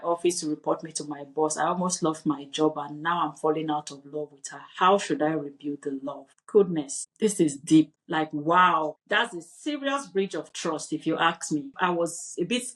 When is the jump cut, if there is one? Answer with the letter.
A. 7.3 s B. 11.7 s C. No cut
B